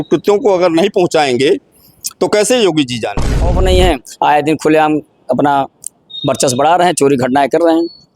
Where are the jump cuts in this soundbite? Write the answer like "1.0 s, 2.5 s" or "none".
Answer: 3.5 s